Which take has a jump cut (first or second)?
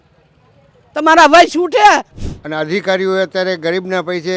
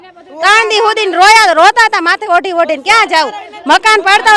first